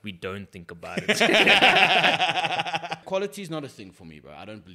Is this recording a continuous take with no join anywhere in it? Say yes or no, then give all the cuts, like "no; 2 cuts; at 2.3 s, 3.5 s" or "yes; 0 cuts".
no; 1 cut; at 3.0 s